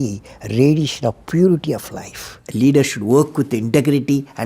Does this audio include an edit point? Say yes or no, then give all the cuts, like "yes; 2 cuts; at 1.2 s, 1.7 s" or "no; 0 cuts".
yes; 1 cut; at 2.4 s